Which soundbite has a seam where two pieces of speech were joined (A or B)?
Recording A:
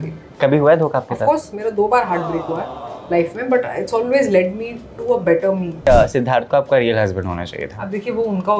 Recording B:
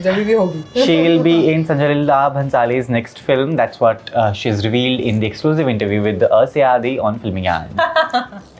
A